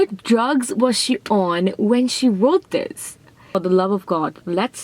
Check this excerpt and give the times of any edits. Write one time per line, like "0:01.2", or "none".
0:03.5

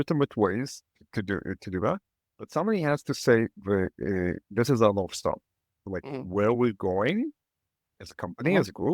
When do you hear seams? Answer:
0:05.9

